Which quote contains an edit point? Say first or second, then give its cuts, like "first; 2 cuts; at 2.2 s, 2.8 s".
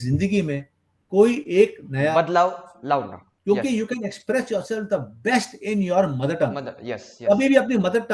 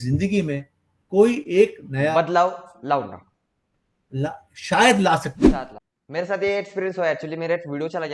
first; 1 cut; at 3.3 s